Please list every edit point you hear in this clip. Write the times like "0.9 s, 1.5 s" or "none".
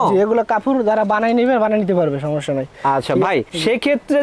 none